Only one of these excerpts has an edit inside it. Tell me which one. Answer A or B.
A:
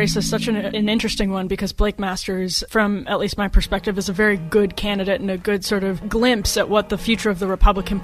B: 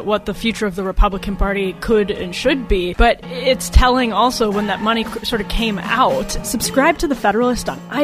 B